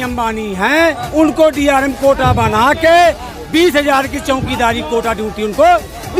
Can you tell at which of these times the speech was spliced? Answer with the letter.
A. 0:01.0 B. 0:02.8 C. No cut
A